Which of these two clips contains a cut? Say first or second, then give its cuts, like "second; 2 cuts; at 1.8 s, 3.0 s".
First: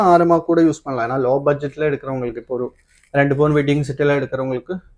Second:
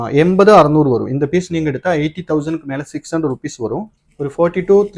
second; 1 cut; at 3.9 s